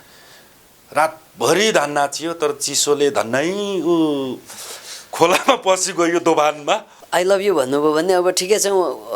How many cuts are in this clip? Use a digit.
1